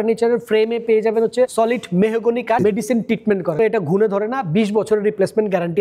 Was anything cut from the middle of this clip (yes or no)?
yes